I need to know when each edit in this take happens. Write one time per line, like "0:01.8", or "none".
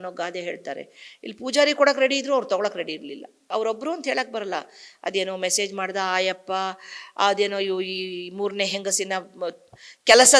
0:03.4